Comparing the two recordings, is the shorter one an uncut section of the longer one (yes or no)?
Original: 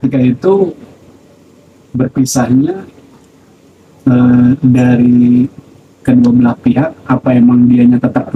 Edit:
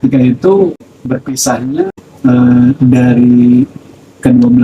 no